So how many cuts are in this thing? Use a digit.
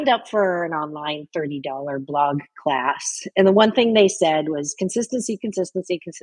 0